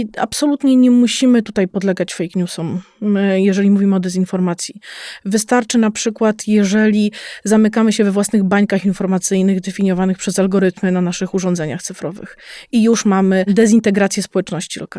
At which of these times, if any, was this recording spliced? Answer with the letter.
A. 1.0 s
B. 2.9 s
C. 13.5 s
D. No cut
C